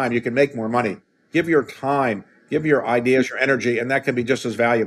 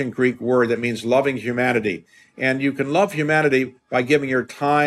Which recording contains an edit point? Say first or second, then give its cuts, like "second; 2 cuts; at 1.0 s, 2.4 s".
first; 1 cut; at 1.2 s